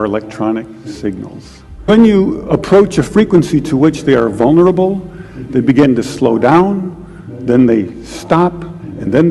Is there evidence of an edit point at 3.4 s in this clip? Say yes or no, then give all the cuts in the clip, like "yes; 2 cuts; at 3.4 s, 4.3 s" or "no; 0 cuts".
no; 1 cut; at 1.9 s